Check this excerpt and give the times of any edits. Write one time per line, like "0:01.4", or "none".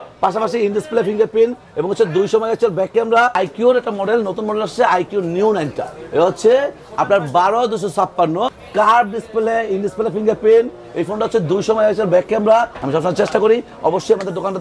0:03.3
0:08.6
0:12.8